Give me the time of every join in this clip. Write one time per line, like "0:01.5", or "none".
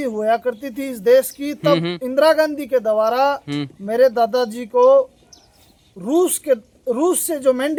none